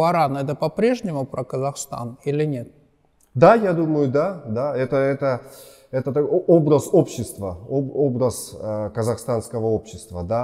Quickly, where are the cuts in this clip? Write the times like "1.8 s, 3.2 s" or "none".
none